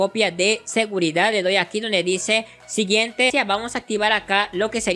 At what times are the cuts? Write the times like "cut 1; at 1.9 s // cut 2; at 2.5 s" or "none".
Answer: cut 1; at 3.3 s